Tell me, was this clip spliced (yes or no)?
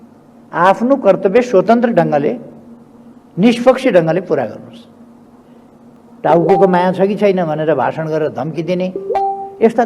yes